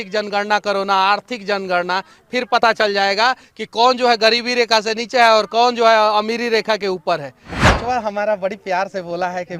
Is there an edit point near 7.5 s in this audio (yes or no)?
yes